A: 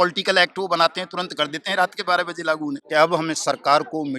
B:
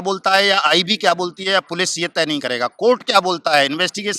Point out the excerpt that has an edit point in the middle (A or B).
A